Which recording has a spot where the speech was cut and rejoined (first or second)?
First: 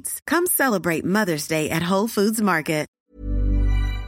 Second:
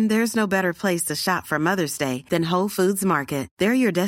first